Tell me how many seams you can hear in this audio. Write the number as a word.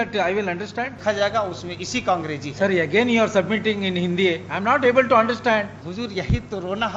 two